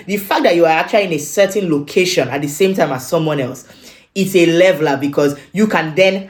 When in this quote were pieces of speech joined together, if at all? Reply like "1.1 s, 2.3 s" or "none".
none